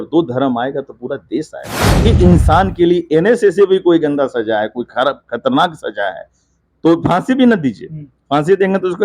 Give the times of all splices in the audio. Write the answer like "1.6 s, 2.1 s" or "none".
2.0 s